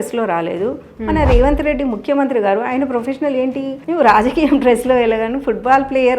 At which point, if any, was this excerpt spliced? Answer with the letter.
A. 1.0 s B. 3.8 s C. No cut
B